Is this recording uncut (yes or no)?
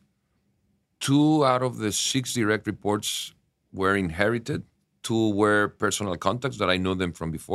yes